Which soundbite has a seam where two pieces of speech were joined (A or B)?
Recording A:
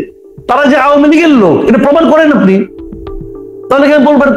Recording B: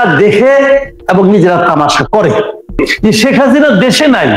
B